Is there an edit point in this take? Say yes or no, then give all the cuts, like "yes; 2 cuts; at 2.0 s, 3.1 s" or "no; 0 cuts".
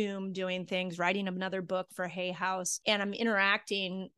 no; 0 cuts